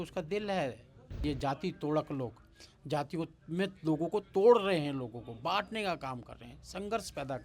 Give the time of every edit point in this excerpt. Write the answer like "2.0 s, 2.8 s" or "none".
1.2 s